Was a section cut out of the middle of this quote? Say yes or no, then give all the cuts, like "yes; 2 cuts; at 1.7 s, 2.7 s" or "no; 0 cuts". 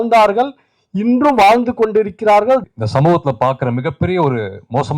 yes; 1 cut; at 2.6 s